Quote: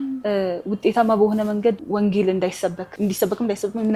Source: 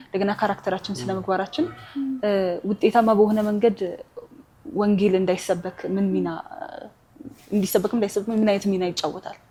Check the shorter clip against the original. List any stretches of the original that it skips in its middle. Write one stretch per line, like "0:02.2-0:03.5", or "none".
0:03.8-0:04.7
0:05.7-0:07.4